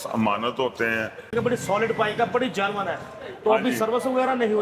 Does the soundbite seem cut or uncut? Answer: cut